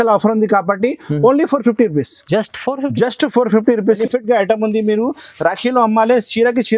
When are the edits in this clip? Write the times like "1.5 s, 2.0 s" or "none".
4.0 s